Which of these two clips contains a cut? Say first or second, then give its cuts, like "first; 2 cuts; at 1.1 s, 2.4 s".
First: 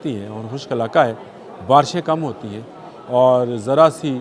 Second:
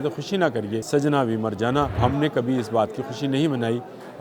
second; 2 cuts; at 0.8 s, 2.0 s